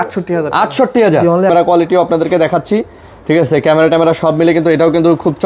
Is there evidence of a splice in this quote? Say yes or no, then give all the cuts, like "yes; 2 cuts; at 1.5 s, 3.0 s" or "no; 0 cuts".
yes; 1 cut; at 1.5 s